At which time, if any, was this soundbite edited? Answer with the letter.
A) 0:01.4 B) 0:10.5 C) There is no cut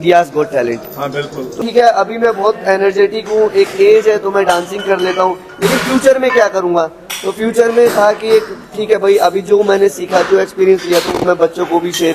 A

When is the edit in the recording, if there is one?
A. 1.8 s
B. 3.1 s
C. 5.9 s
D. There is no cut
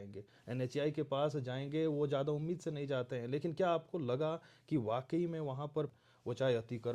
C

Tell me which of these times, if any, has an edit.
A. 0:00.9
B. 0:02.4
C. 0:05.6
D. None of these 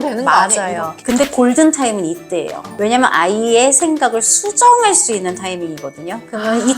A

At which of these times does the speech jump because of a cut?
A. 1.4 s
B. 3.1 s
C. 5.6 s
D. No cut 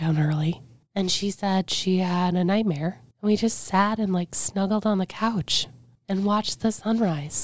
D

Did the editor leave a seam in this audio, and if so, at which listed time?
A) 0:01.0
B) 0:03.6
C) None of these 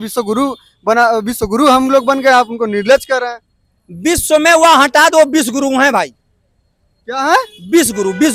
C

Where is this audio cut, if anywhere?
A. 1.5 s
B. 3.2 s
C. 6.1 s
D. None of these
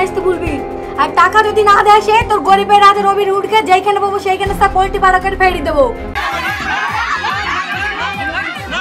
C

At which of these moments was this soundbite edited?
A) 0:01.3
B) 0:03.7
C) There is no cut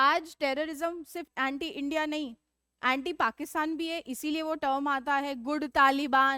A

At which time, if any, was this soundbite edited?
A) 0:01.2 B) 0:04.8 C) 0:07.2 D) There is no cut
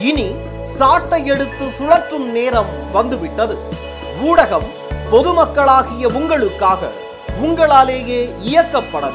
D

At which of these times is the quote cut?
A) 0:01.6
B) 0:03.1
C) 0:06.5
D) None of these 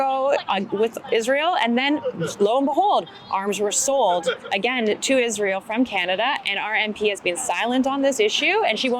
D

